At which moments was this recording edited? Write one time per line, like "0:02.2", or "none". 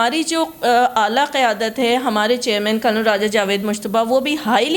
none